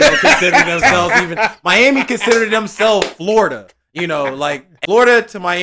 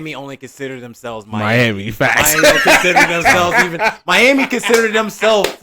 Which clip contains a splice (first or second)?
first